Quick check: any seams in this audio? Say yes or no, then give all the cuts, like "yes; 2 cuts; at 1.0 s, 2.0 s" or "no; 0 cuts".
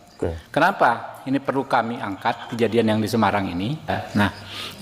yes; 1 cut; at 3.9 s